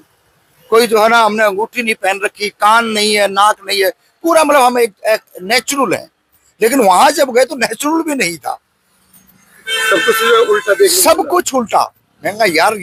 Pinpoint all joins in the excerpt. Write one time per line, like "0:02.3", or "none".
none